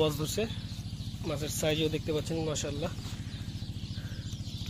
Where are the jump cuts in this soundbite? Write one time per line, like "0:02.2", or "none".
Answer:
none